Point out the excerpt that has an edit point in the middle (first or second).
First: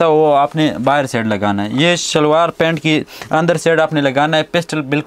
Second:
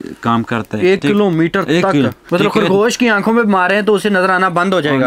second